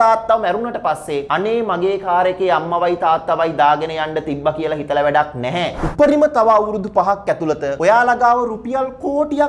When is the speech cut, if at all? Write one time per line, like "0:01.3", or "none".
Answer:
0:01.2
0:05.8
0:07.7

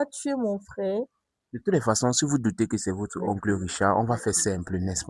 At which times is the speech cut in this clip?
none

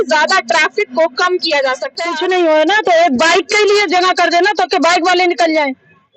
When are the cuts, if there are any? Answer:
0:02.1

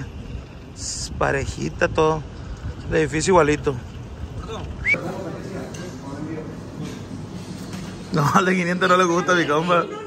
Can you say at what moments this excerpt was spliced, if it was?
0:04.8

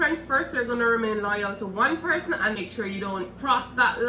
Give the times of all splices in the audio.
0:02.6

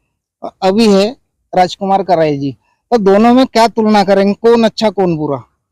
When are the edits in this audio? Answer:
none

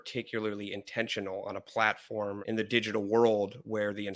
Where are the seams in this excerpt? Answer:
0:02.4

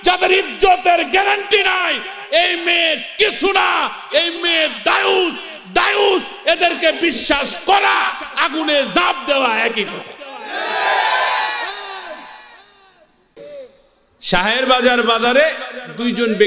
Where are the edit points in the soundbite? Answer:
0:13.3

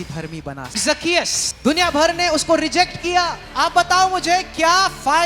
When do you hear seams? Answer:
0:00.9
0:03.5

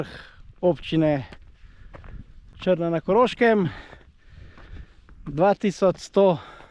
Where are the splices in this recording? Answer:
none

